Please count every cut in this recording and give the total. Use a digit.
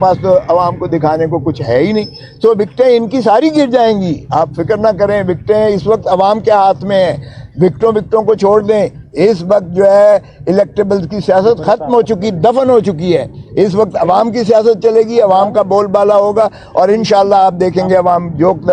0